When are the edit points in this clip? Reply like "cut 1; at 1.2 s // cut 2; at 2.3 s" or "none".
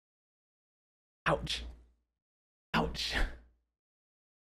none